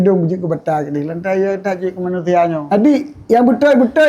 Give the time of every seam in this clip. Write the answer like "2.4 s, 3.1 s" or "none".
2.6 s